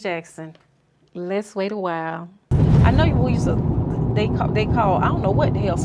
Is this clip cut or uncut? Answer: cut